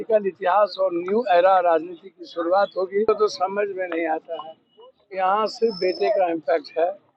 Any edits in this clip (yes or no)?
yes